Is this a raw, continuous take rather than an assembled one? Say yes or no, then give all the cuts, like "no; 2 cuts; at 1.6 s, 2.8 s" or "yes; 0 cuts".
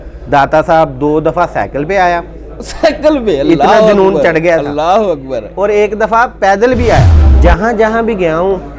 no; 1 cut; at 7.2 s